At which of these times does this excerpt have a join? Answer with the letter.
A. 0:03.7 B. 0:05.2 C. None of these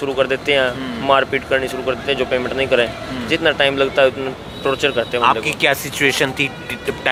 C